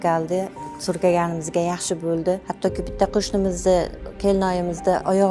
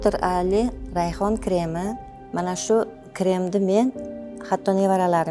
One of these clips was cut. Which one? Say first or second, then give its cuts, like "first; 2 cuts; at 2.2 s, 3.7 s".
first; 1 cut; at 2.5 s